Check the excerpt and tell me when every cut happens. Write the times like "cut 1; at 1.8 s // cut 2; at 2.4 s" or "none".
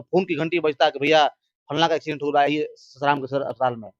none